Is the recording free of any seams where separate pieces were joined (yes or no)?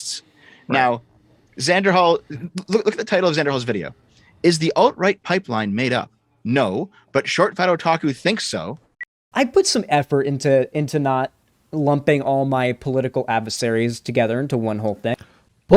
no